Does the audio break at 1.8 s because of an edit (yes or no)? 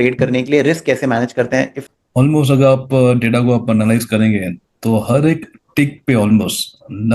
yes